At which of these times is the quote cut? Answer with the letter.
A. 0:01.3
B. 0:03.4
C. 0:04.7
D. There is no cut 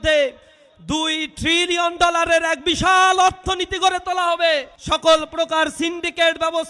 C